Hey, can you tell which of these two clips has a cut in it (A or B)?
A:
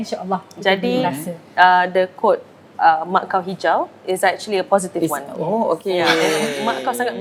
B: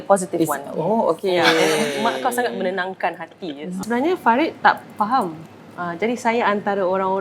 B